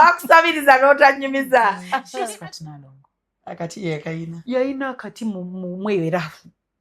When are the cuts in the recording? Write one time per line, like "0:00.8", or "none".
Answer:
0:02.1